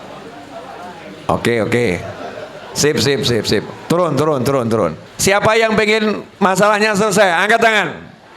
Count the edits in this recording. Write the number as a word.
one